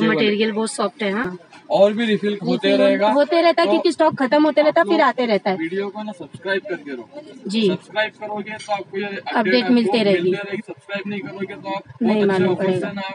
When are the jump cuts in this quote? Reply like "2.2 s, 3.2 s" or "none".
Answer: 1.3 s